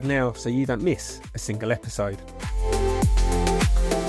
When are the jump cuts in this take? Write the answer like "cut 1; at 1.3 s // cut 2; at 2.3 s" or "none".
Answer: none

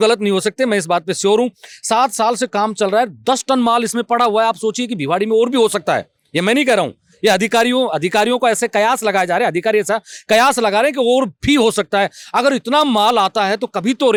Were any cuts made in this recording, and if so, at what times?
none

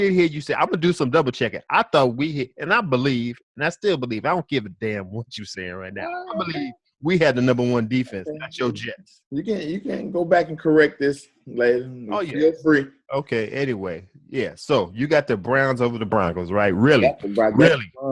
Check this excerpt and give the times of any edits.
none

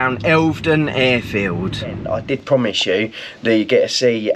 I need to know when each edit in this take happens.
cut 1; at 2.0 s

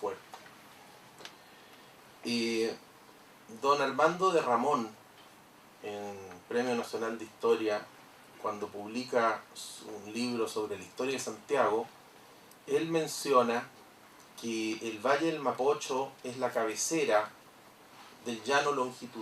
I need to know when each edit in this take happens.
cut 1; at 3.7 s

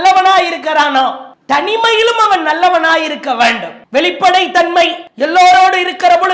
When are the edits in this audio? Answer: cut 1; at 3.7 s // cut 2; at 5.1 s

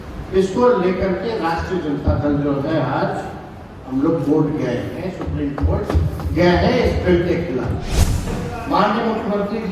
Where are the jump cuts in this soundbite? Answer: cut 1; at 8.3 s

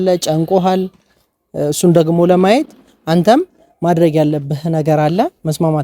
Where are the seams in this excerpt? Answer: none

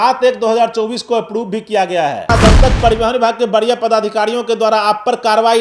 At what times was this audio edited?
cut 1; at 2.3 s

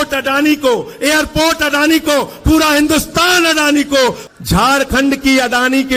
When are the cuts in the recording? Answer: cut 1; at 4.2 s

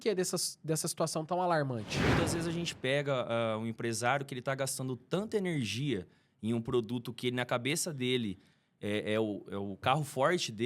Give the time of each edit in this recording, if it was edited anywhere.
cut 1; at 1.9 s

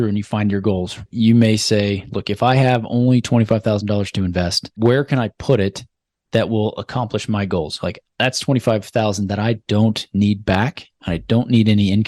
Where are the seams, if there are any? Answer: cut 1; at 1.0 s // cut 2; at 4.6 s

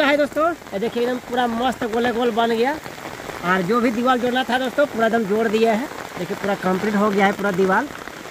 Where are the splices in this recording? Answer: none

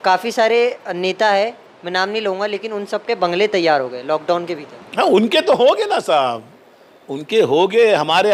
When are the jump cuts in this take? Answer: none

